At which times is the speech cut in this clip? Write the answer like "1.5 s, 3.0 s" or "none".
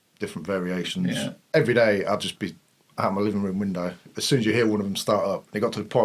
1.4 s

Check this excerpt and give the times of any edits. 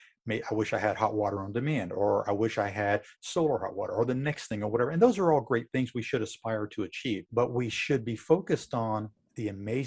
7.3 s

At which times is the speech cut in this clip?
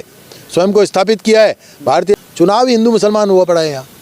2.1 s

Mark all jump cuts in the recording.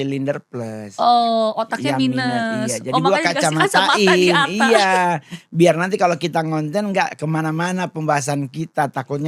none

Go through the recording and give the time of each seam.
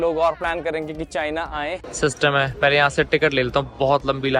1.8 s

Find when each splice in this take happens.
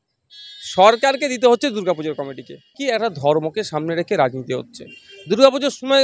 2.7 s

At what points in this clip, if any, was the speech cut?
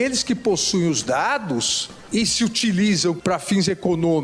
2.1 s, 3.2 s

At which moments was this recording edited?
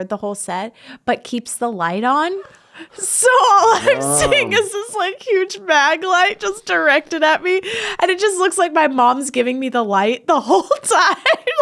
none

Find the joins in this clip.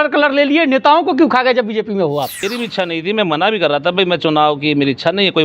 2.6 s

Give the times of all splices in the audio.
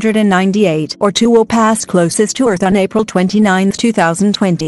1.2 s

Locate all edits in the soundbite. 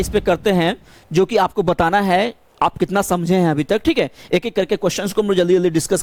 none

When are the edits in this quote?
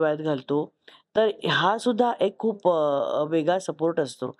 none

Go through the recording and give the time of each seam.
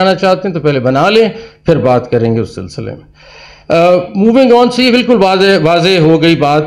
none

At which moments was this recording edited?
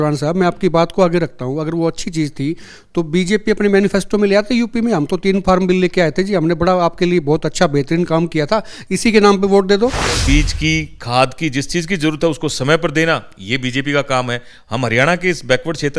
10.2 s

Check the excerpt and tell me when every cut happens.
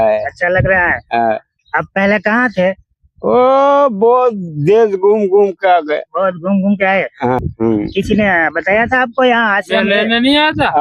7.4 s

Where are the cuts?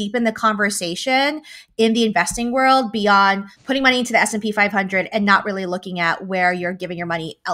none

